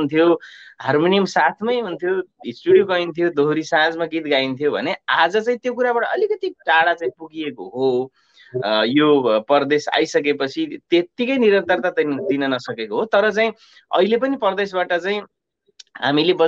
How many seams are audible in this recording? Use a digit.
0